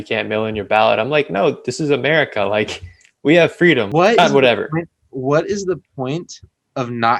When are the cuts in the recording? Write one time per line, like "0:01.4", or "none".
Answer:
0:03.9